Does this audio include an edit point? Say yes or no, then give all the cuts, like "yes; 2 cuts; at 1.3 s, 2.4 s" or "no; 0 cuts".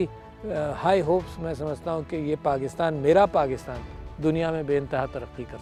no; 0 cuts